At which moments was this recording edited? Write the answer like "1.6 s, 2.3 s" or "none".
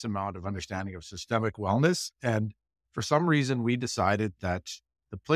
none